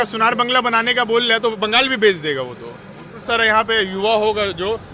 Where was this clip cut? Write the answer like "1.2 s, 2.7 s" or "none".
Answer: 3.3 s